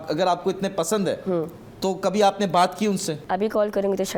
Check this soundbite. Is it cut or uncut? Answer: uncut